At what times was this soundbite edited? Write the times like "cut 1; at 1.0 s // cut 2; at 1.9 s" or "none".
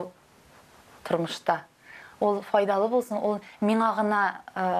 none